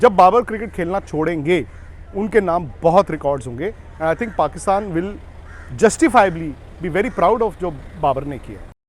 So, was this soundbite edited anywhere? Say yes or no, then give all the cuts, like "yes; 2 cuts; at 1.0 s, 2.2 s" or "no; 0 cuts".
no; 0 cuts